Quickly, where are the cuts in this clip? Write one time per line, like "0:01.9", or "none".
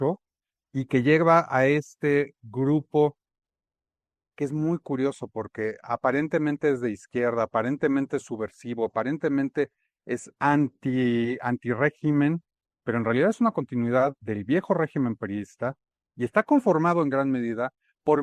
none